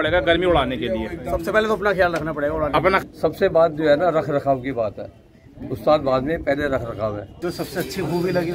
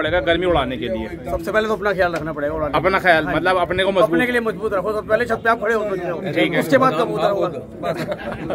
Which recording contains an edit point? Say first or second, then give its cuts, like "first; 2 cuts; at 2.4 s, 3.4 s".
first; 2 cuts; at 3.0 s, 7.4 s